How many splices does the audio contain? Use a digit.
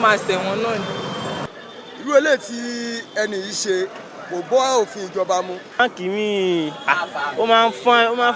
2